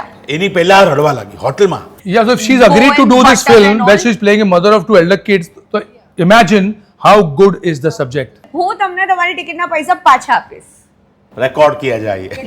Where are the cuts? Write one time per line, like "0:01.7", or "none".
0:01.9
0:08.4